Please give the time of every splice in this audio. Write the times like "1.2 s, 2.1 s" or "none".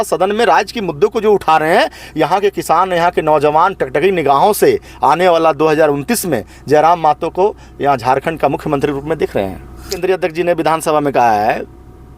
10.0 s